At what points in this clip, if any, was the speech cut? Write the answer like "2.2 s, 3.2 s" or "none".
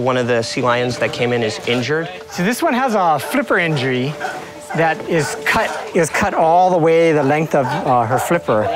2.2 s